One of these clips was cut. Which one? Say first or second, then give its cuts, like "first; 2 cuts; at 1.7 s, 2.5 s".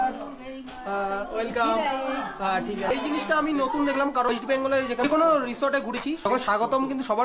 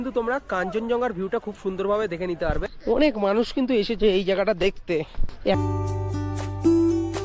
second; 1 cut; at 5.5 s